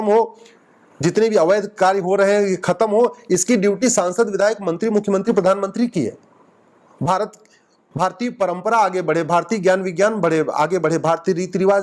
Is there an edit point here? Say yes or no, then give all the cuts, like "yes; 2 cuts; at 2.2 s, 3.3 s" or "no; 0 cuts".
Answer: no; 0 cuts